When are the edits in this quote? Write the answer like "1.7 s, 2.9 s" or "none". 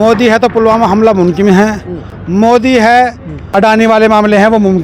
3.5 s

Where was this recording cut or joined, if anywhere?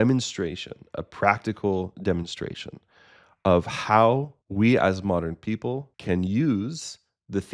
4.4 s, 5.9 s

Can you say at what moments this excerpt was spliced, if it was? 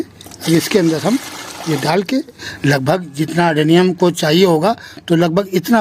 2.5 s

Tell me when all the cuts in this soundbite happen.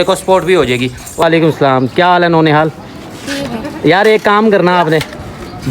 1.2 s

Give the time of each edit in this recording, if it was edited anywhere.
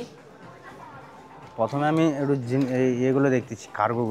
none

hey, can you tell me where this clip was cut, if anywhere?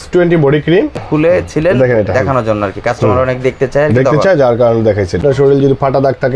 1.0 s, 5.2 s

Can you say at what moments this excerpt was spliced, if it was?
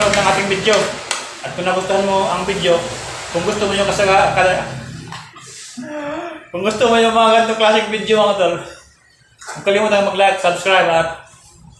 none

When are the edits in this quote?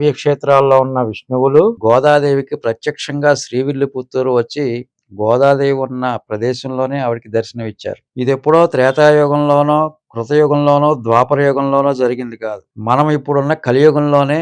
1.8 s

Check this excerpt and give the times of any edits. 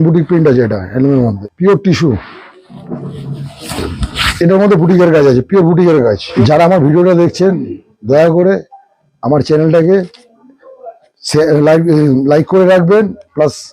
1.4 s, 6.2 s

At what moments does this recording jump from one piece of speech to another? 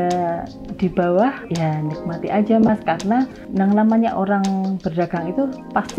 3.4 s

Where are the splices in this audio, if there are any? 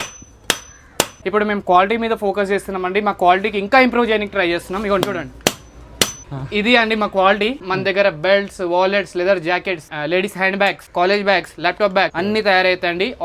1.2 s, 6.3 s, 7.6 s, 12.1 s

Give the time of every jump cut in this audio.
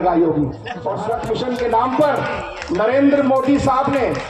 1.0 s

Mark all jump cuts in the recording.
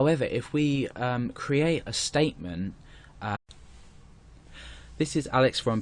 none

